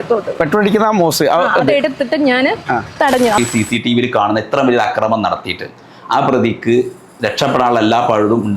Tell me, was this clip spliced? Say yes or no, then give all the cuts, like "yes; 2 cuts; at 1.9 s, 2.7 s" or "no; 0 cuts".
yes; 1 cut; at 3.4 s